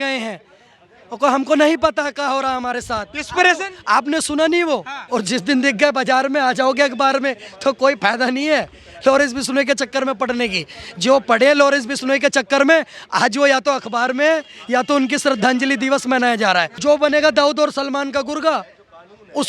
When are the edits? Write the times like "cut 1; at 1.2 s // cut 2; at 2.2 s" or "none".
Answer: cut 1; at 5.0 s // cut 2; at 16.7 s

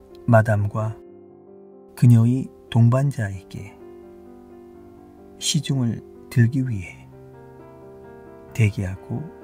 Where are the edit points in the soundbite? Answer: none

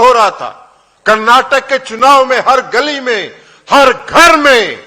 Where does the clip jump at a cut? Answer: none

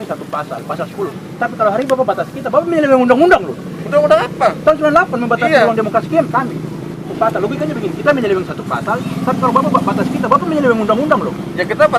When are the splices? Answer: cut 1; at 7.1 s

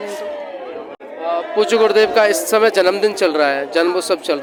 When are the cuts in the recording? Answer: none

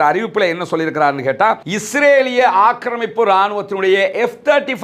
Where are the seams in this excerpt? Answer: cut 1; at 1.7 s

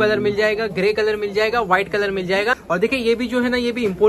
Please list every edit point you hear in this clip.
cut 1; at 2.6 s

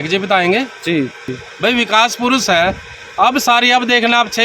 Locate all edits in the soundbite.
cut 1; at 1.2 s

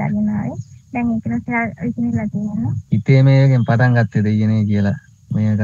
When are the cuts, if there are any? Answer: cut 1; at 2.8 s

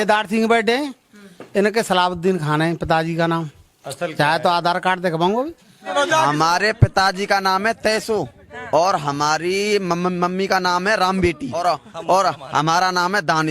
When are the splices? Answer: cut 1; at 5.9 s // cut 2; at 11.6 s

